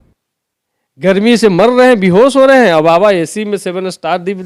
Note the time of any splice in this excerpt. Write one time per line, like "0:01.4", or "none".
none